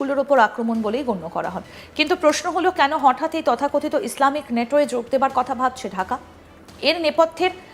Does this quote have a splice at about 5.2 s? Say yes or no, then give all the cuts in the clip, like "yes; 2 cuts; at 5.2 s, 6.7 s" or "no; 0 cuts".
no; 1 cut; at 1.6 s